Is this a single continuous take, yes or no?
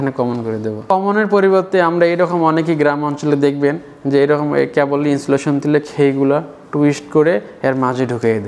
no